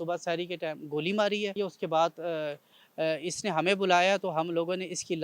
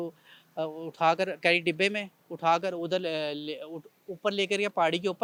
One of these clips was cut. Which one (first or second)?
first